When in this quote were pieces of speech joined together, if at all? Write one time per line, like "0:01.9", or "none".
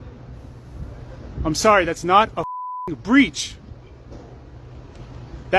none